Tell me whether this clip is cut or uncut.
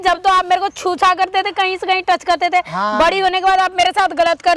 uncut